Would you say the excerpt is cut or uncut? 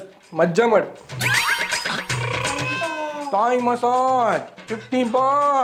uncut